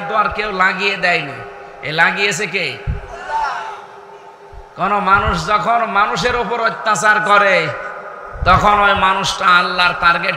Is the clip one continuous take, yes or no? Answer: yes